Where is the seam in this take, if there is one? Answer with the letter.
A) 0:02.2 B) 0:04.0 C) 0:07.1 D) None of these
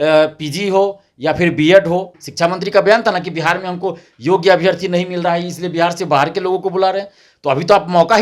A